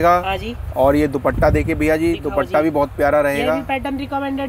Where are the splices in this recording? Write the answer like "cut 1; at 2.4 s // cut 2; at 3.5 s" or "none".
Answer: none